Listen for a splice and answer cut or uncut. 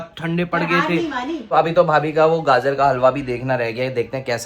cut